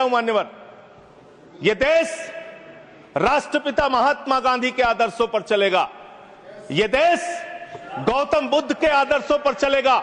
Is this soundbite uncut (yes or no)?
yes